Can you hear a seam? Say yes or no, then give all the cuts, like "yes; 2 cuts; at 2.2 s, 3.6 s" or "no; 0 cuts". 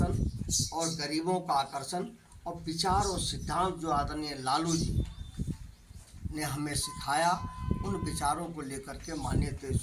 no; 0 cuts